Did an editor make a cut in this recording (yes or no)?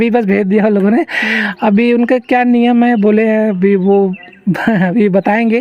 no